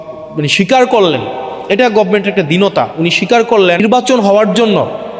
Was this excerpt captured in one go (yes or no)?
no